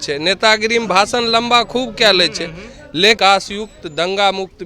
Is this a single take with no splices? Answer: no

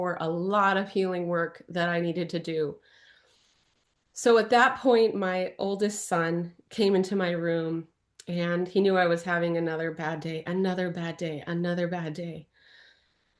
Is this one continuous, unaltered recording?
yes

